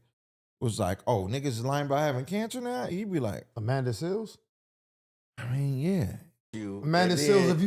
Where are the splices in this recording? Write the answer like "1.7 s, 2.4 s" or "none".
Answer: 6.6 s